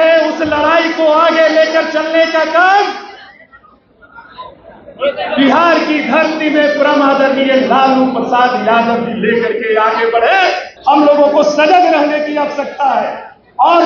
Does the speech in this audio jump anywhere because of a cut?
yes; 1 cut; at 10.7 s

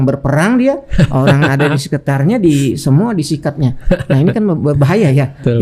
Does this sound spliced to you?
no; 0 cuts

